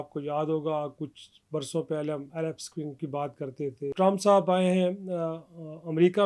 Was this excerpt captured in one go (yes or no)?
no